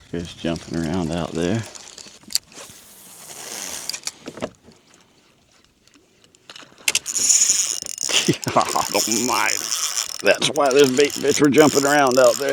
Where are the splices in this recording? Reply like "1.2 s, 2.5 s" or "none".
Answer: 2.1 s, 4.8 s